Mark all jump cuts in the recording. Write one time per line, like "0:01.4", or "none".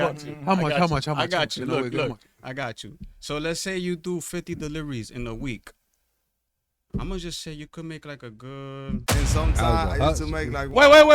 0:09.1